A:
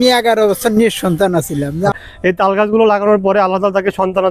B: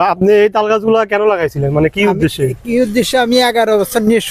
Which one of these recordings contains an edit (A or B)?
A